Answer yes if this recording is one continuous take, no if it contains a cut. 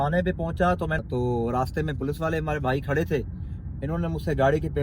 no